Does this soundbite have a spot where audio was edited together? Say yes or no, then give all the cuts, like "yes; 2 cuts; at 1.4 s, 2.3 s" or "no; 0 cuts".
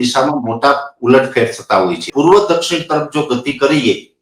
yes; 1 cut; at 2.1 s